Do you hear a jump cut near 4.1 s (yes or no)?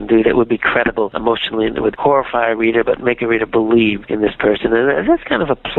no